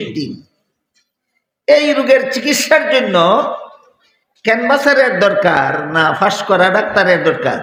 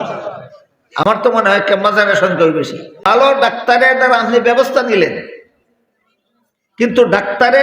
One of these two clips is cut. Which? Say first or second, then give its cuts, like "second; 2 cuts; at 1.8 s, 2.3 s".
second; 1 cut; at 3.1 s